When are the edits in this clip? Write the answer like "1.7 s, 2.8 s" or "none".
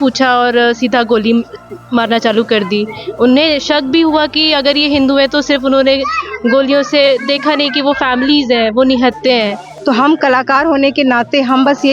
9.6 s